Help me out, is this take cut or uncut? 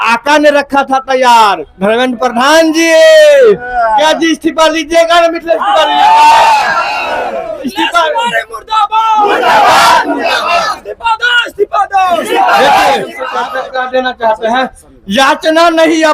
cut